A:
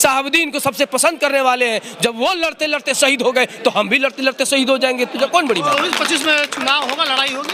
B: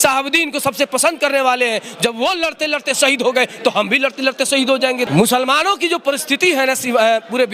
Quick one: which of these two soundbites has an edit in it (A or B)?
B